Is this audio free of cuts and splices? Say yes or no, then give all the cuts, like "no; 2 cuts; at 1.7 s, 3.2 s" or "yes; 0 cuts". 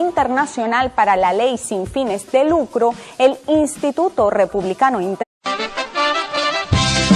yes; 0 cuts